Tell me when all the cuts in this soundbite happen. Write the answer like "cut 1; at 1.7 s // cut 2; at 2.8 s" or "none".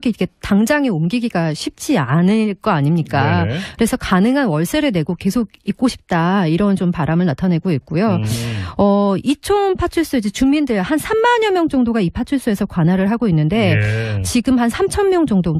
cut 1; at 2.8 s